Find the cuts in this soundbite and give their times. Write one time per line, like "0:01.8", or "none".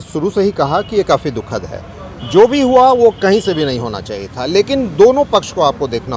none